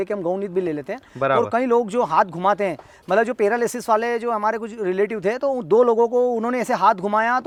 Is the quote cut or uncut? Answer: uncut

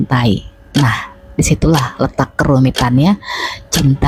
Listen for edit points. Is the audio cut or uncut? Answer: uncut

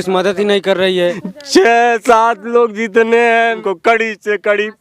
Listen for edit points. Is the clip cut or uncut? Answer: cut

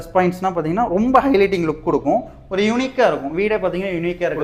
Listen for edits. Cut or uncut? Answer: uncut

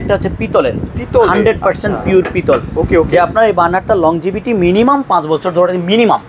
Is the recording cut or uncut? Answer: uncut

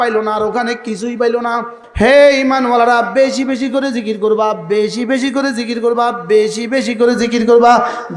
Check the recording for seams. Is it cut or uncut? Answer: cut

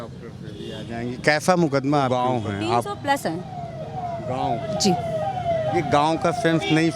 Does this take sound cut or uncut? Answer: cut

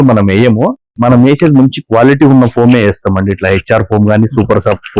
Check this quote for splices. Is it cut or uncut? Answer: cut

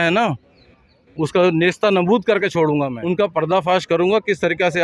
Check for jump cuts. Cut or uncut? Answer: cut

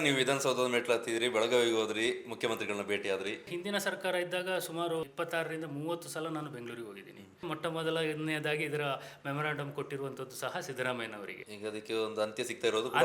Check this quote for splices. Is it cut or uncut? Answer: cut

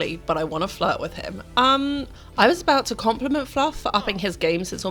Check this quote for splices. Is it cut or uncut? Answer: uncut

